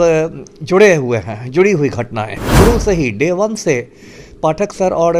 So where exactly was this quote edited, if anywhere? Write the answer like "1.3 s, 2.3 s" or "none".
2.4 s